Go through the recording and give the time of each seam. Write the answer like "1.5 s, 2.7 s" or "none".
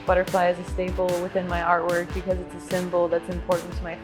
none